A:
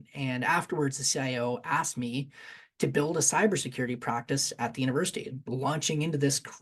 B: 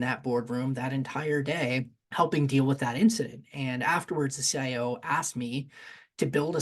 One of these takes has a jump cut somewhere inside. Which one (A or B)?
B